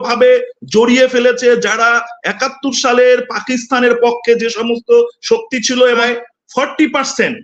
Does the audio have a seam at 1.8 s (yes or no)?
no